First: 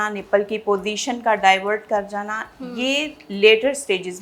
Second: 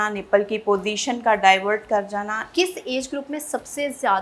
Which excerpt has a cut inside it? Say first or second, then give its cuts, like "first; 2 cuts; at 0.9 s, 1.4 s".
second; 1 cut; at 2.5 s